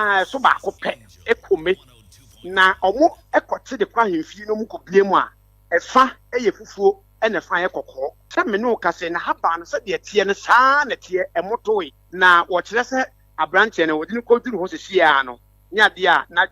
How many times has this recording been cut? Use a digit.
2